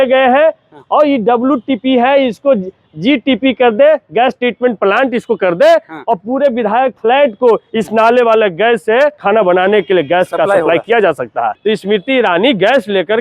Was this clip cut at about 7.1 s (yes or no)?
no